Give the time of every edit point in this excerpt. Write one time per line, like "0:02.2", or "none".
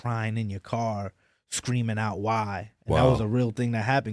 none